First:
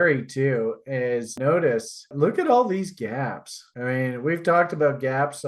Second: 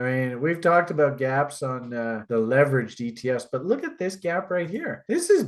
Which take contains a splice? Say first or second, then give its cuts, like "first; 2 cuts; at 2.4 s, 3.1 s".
first; 1 cut; at 1.3 s